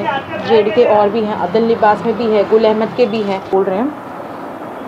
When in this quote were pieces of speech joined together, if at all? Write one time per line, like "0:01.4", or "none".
0:03.5

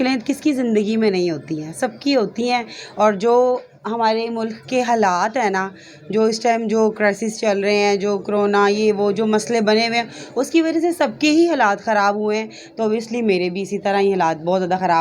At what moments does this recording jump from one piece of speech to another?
none

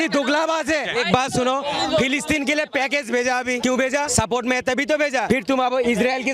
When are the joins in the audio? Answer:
0:00.9
0:03.8
0:05.6

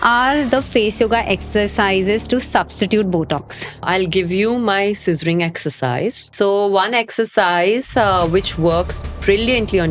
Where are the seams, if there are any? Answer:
0:03.9
0:06.3

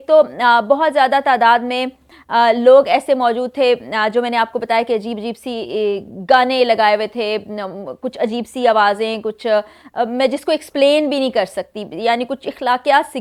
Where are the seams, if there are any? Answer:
none

